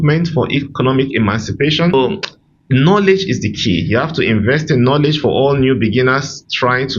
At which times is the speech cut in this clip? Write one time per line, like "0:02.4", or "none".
0:01.9